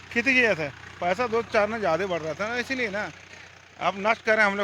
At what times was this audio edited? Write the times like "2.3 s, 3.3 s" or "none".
none